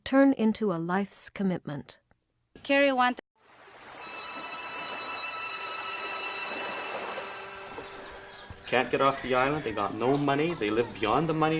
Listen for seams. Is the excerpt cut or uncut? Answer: uncut